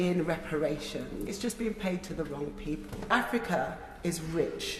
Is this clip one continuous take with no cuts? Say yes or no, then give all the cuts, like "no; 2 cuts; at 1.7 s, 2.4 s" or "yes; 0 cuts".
no; 2 cuts; at 1.3 s, 3.1 s